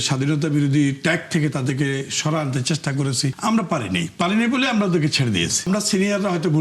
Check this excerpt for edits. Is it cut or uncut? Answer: cut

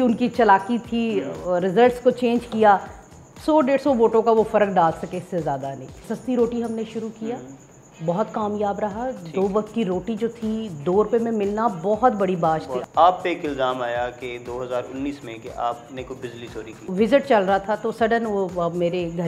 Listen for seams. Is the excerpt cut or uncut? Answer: cut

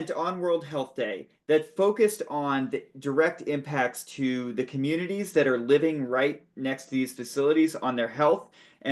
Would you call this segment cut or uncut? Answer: uncut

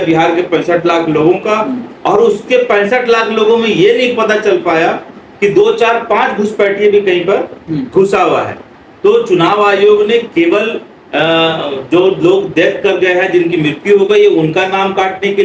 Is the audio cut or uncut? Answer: uncut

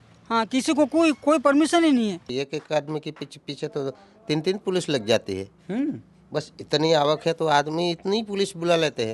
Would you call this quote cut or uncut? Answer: cut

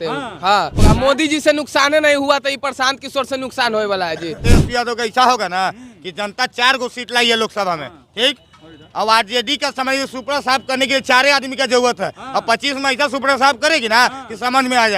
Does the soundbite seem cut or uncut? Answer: cut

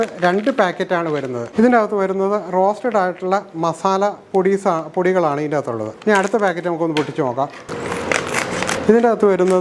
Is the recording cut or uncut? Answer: cut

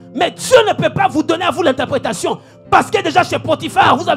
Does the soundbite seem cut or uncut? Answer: uncut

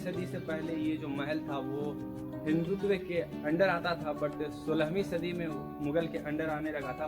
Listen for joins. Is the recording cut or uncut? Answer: uncut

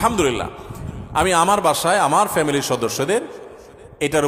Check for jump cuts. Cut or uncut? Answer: uncut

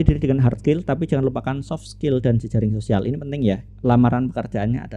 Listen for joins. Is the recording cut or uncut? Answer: cut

